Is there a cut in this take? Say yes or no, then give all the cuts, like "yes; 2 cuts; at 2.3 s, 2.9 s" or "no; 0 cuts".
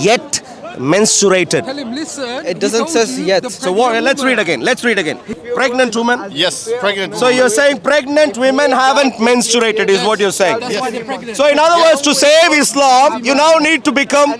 yes; 1 cut; at 5.3 s